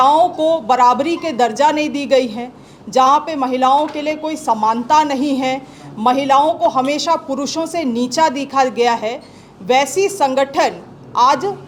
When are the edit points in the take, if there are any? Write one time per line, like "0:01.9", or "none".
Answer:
none